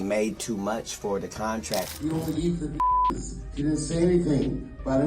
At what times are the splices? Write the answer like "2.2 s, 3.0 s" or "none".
1.9 s